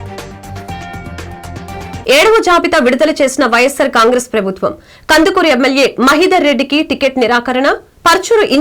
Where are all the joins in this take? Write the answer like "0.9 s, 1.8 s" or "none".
2.0 s

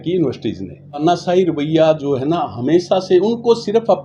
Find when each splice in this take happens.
1.0 s

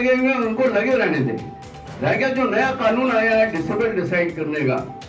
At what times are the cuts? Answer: none

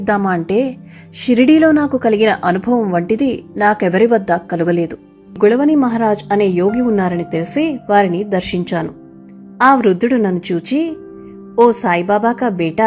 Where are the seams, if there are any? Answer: 5.4 s

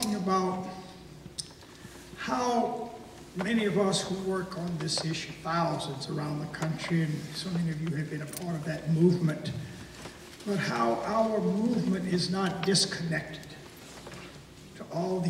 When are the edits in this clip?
14.2 s

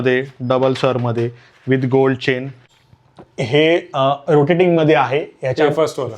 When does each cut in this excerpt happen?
2.6 s

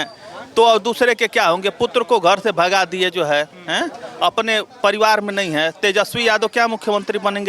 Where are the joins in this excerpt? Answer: none

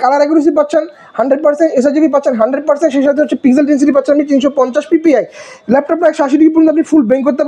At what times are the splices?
none

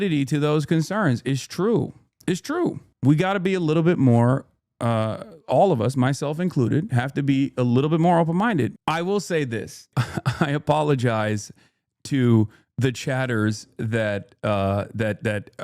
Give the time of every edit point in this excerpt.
8.7 s, 9.9 s

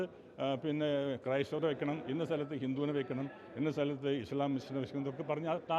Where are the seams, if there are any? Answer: none

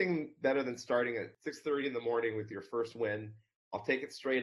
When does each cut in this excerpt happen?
1.4 s

